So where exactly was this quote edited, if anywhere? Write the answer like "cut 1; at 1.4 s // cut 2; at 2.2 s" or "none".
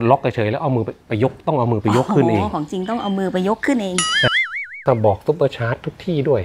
cut 1; at 4.6 s